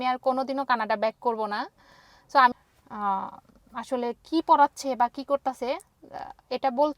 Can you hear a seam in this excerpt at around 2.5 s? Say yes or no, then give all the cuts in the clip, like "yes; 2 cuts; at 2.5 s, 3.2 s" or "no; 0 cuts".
yes; 1 cut; at 2.5 s